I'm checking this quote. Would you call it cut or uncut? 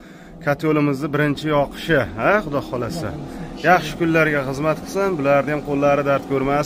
uncut